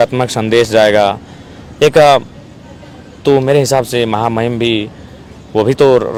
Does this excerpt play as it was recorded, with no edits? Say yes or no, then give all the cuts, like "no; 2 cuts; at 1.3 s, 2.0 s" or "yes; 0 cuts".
yes; 0 cuts